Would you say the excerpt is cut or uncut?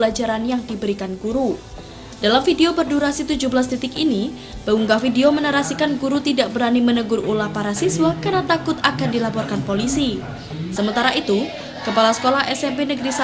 uncut